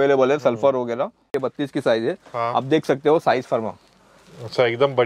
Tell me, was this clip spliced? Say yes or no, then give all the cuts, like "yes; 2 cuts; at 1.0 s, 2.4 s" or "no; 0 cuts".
yes; 1 cut; at 1.4 s